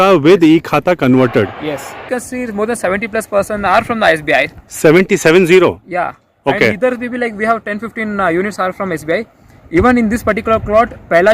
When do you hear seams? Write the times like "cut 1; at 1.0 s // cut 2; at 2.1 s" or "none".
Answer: cut 1; at 2.1 s